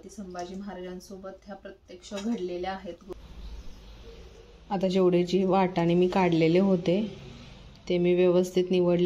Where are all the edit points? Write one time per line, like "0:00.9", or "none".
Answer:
0:03.1